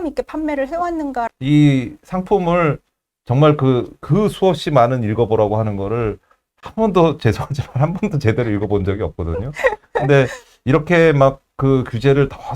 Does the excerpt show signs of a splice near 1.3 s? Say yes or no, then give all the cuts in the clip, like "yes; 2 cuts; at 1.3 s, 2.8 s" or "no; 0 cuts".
yes; 1 cut; at 1.3 s